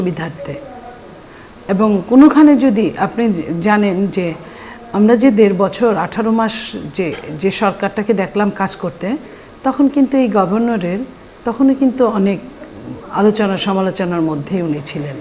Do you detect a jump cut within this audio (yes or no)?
no